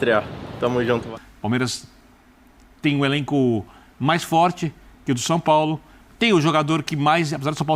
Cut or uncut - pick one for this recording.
cut